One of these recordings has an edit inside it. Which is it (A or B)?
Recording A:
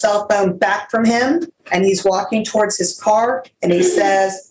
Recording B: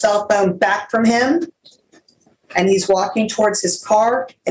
A